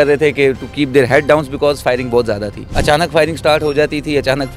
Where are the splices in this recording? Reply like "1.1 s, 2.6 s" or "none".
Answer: 2.8 s